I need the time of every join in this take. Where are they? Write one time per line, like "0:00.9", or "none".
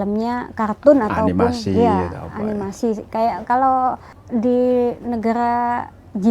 0:04.1